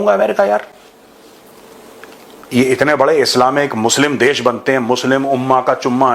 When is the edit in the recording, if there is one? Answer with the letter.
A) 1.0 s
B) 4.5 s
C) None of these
C